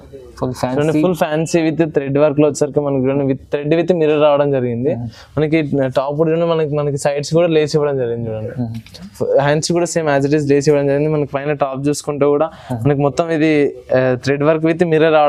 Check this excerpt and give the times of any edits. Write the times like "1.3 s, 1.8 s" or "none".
none